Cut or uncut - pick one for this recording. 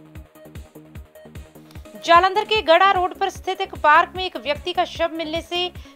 cut